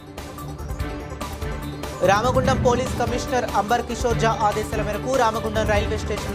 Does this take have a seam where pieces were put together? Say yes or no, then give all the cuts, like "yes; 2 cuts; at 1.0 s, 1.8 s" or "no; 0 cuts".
no; 0 cuts